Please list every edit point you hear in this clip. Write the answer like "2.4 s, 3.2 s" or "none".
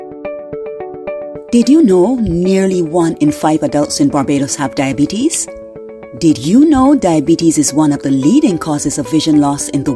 1.4 s